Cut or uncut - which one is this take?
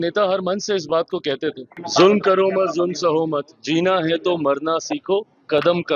cut